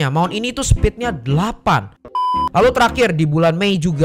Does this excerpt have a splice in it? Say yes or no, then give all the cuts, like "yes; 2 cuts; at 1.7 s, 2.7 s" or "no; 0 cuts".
yes; 1 cut; at 2.1 s